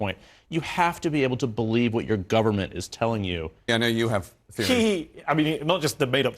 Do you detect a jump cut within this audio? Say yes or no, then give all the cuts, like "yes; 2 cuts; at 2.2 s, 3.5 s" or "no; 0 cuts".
yes; 1 cut; at 3.7 s